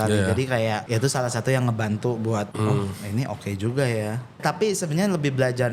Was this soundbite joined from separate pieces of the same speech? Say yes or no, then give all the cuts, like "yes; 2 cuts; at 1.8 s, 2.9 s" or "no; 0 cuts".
yes; 3 cuts; at 0.8 s, 2.5 s, 4.4 s